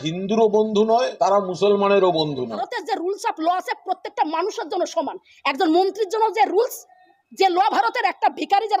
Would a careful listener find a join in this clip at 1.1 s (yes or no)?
yes